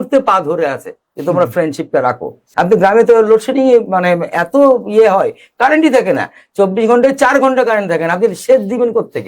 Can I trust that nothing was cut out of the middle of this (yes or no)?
no